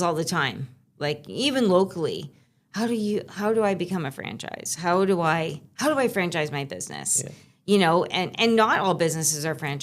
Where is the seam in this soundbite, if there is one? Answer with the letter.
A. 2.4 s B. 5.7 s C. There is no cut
C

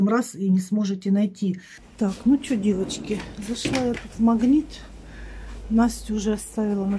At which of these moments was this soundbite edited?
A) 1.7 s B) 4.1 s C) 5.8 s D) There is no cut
A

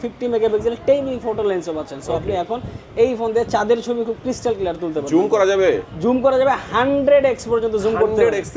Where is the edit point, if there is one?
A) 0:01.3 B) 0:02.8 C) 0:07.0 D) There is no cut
D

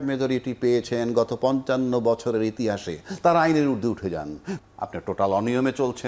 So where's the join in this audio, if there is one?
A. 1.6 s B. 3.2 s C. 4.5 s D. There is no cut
C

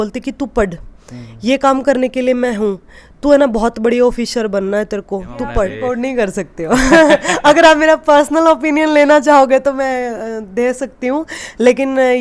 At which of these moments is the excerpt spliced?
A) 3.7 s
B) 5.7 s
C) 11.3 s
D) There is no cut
B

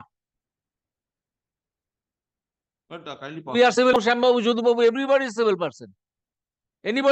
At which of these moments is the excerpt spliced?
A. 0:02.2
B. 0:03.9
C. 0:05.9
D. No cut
B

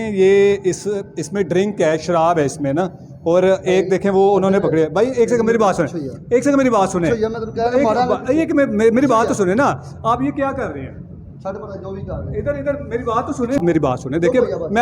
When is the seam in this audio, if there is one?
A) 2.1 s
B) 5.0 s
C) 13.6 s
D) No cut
C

